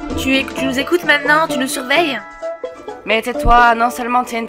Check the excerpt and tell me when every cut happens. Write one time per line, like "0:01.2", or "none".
none